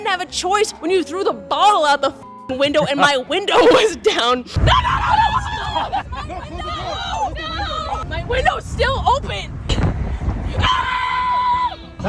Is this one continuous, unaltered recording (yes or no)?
yes